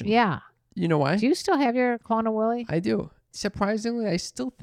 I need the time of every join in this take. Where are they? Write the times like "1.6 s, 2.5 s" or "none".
3.3 s